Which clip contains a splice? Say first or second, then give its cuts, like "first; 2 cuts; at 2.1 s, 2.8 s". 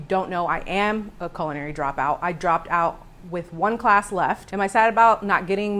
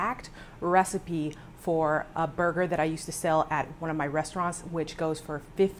first; 1 cut; at 4.5 s